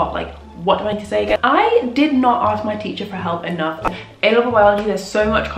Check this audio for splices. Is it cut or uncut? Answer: cut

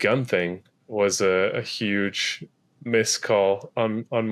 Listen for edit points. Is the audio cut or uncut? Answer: uncut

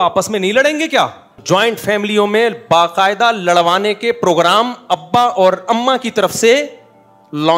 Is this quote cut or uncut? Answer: cut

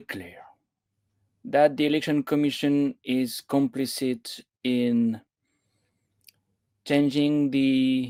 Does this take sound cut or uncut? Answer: uncut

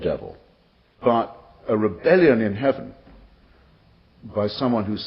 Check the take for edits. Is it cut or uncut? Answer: cut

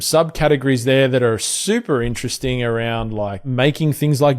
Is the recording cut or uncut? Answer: cut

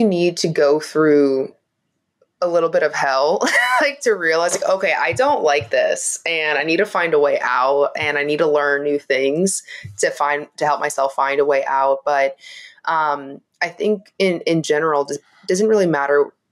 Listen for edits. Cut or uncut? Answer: uncut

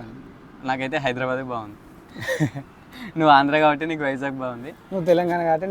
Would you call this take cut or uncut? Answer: uncut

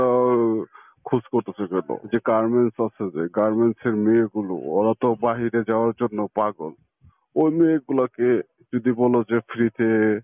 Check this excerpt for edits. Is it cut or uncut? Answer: cut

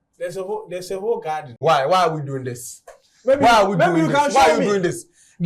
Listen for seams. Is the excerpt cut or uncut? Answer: cut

